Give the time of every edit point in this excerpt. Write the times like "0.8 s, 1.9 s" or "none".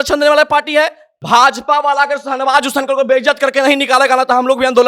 1.1 s